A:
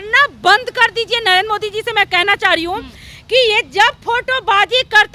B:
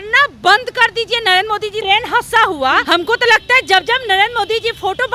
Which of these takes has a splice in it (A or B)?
B